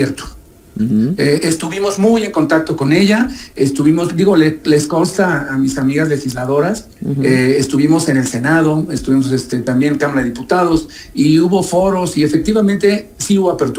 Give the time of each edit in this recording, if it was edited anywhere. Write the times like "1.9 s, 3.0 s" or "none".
none

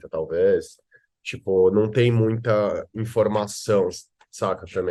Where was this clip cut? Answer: none

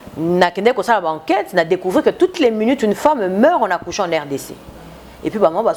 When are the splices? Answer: none

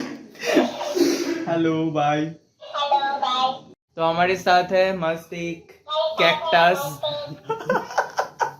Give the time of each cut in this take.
3.7 s

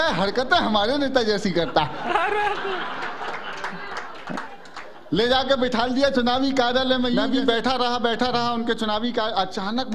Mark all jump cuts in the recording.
7.2 s

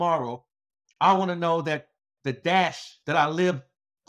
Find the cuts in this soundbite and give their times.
2.9 s

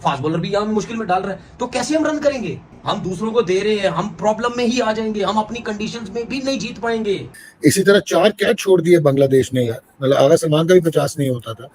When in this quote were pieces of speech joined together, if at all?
7.2 s

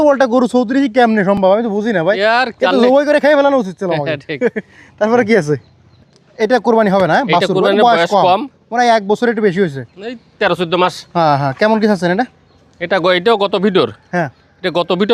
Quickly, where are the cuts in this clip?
none

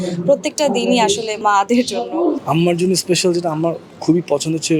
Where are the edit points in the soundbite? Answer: 1.3 s, 2.4 s

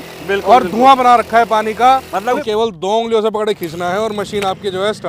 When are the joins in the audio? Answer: 2.4 s

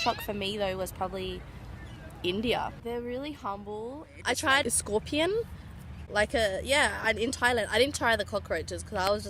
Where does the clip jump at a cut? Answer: 2.8 s, 4.2 s

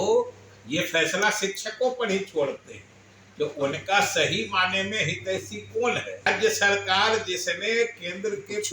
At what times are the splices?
6.2 s

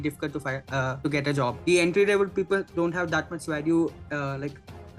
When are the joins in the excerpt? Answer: 1.2 s

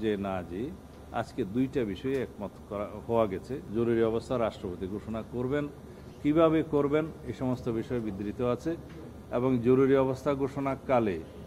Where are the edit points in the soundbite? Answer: 3.3 s

